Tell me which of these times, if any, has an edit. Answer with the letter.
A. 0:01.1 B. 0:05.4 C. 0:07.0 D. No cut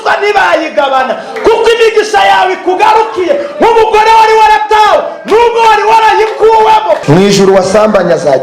C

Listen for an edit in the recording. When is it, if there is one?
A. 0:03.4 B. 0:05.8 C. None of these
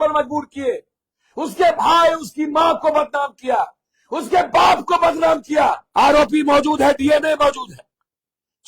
B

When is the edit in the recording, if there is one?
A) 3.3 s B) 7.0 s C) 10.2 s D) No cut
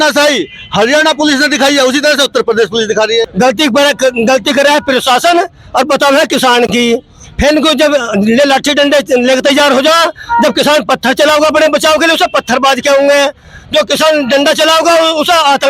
A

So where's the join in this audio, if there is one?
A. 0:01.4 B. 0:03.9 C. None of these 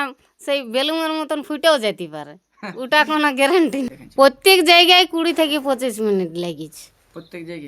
B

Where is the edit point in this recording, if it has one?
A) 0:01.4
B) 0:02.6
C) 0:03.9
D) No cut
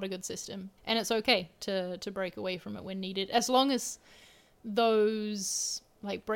D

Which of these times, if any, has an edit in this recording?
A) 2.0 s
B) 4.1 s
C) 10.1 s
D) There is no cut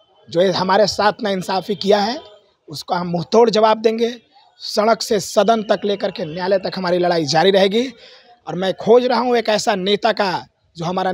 D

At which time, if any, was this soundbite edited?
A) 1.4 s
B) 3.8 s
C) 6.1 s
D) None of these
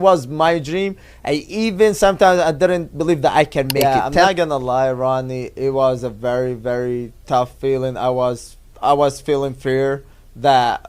B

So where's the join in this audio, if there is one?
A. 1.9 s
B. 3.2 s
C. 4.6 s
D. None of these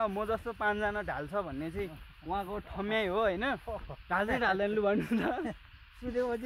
D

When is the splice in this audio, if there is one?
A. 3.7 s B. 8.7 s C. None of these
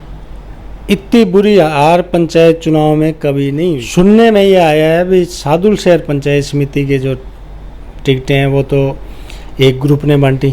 A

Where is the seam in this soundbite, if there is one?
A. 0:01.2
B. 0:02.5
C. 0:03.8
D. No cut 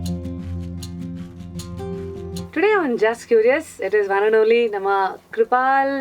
B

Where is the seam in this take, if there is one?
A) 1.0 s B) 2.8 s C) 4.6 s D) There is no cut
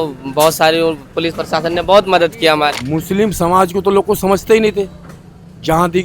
B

